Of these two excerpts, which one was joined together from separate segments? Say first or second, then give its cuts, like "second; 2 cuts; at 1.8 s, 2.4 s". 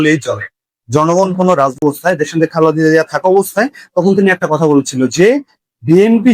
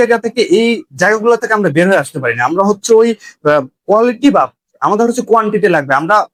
first; 1 cut; at 1.8 s